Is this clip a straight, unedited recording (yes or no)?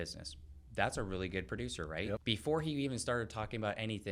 no